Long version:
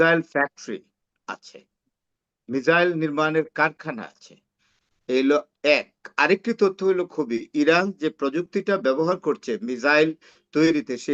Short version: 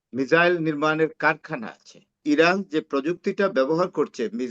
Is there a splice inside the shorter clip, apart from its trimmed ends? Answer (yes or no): yes